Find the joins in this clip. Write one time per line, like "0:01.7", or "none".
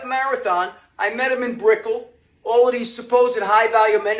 none